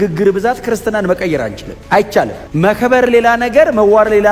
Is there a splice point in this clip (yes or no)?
no